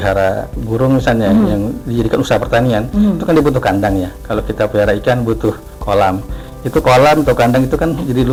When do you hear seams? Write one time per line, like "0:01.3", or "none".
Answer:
none